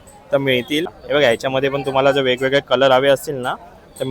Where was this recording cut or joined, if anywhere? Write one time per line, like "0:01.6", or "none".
0:00.9